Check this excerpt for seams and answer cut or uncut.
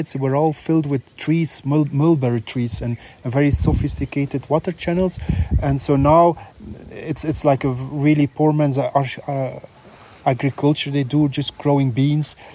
uncut